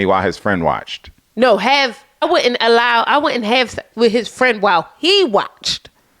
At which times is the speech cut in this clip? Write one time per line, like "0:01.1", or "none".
0:02.1